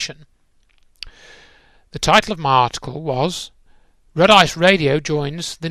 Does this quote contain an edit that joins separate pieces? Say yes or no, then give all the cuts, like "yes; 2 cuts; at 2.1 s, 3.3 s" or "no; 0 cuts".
yes; 1 cut; at 4.5 s